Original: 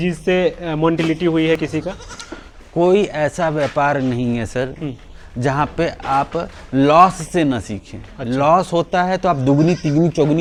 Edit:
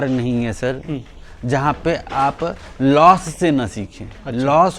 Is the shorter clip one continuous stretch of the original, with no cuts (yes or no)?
yes